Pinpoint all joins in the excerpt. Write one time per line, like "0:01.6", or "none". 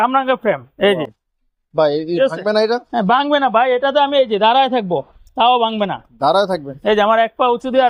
none